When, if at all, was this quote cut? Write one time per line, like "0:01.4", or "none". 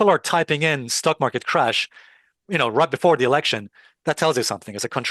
none